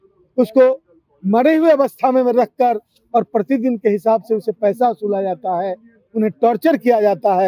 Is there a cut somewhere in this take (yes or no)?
no